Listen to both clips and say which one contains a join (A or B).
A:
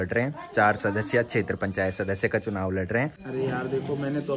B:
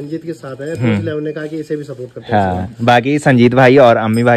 A